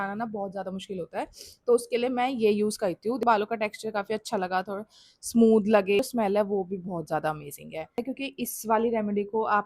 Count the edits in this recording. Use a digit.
3